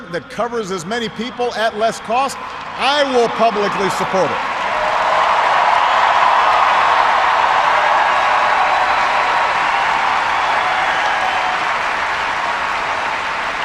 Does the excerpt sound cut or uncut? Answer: cut